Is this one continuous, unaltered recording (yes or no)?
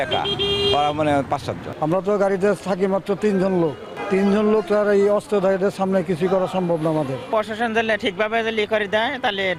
no